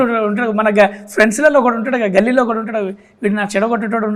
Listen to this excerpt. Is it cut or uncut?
uncut